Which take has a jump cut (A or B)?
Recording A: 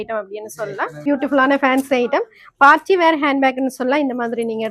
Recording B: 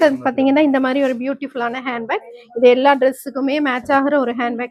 A